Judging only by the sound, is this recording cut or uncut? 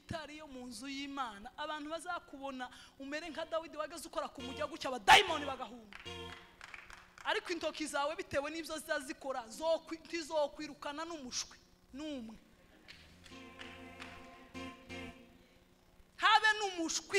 uncut